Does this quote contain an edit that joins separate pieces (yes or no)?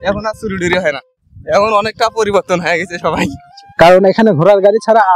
yes